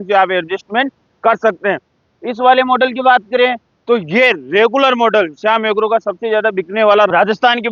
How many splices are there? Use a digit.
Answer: 0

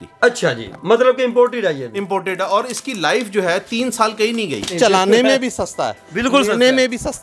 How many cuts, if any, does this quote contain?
1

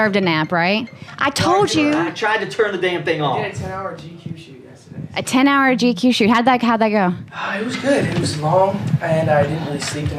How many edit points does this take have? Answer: 0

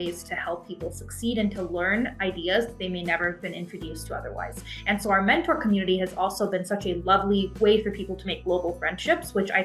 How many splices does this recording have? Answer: 0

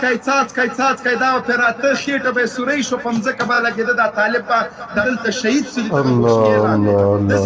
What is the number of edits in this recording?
1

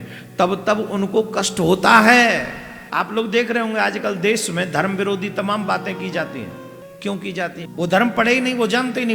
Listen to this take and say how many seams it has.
3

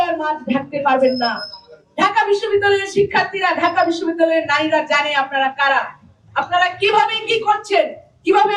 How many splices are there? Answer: 0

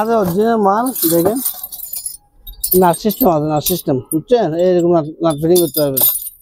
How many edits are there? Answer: 0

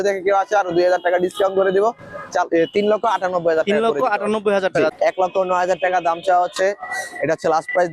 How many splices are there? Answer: 1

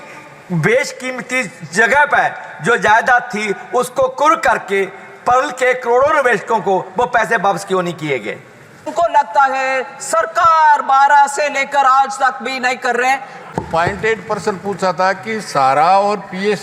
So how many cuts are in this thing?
2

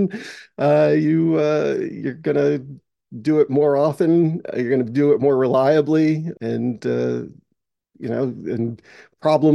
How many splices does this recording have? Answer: 1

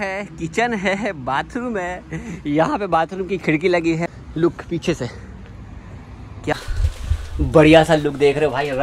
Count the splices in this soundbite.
2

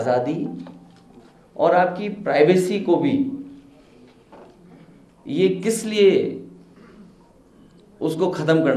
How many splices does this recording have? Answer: 0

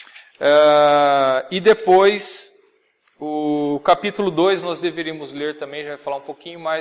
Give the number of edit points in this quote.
0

